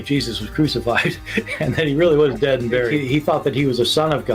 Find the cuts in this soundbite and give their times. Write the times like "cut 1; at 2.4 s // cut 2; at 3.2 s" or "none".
cut 1; at 1.5 s